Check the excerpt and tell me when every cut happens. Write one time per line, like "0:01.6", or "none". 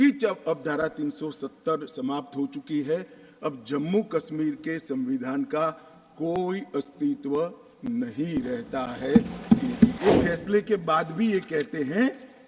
0:10.0